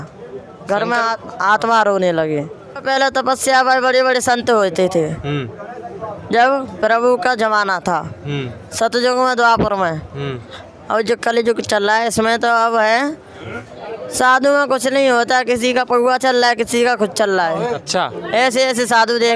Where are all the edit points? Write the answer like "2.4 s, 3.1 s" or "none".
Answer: 2.8 s, 13.5 s, 17.8 s